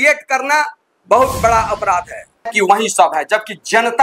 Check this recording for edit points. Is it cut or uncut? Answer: cut